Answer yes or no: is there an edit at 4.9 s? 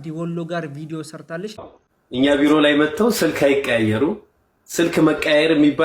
no